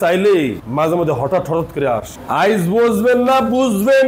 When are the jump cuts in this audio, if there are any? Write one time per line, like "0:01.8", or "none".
0:02.2